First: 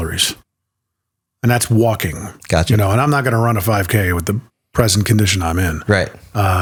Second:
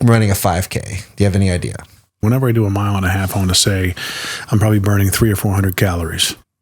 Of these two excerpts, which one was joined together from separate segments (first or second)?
second